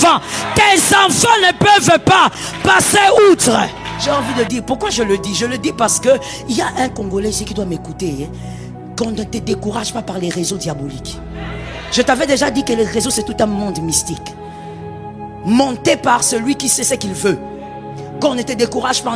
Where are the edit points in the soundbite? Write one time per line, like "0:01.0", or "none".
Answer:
0:03.9